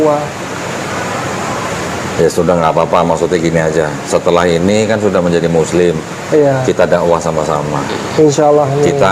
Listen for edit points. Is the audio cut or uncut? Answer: uncut